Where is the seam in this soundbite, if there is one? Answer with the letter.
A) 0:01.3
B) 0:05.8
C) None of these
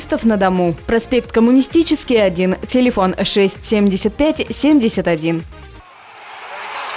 B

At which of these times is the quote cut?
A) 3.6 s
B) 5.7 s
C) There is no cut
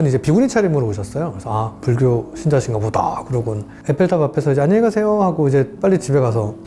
A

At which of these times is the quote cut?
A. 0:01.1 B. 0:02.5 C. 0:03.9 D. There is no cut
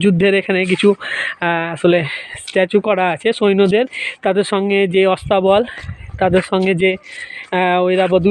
D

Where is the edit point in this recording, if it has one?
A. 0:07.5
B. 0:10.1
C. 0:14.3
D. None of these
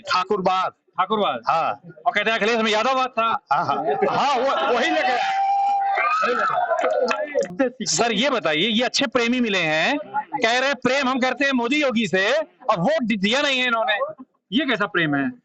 A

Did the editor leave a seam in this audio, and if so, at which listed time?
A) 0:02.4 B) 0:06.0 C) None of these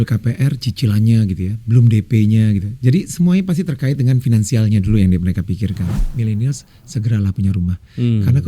B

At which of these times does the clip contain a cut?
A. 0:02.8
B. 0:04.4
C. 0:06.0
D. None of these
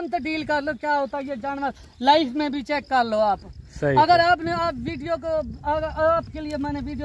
D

